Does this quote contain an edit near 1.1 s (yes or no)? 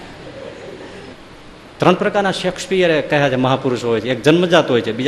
yes